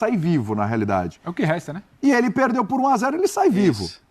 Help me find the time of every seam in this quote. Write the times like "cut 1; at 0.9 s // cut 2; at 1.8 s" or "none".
none